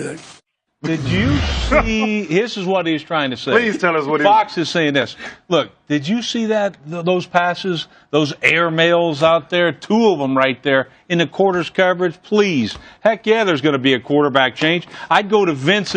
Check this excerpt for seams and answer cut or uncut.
uncut